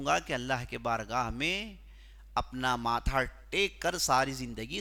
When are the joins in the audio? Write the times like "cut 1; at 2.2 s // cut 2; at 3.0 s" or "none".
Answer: none